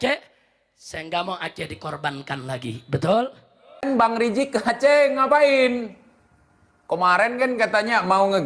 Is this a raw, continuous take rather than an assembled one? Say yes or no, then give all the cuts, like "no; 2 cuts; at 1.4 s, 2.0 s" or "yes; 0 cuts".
no; 1 cut; at 3.8 s